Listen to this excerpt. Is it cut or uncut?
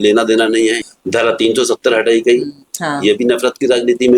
cut